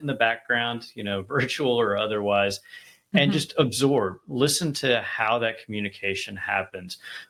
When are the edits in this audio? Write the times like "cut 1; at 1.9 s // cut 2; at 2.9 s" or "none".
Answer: none